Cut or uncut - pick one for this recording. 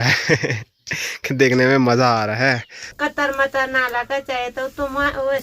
cut